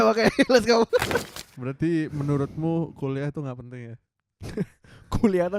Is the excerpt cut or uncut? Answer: cut